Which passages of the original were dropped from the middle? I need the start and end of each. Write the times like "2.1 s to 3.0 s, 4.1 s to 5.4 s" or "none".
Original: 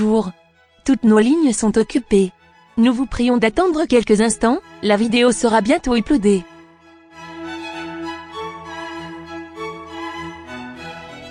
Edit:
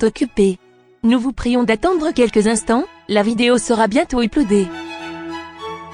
6.4 s to 7.4 s